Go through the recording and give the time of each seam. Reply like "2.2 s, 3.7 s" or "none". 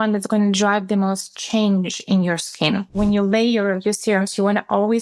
3.0 s